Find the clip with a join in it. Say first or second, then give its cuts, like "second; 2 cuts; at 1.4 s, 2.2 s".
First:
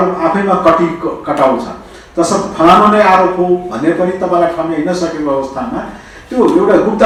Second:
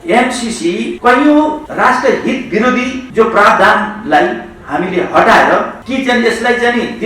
second; 4 cuts; at 0.9 s, 1.6 s, 3.0 s, 5.8 s